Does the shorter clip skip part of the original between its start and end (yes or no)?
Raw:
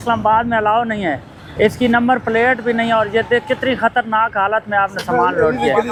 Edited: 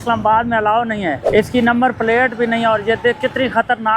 yes